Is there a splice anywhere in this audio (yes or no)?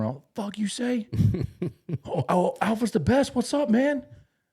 no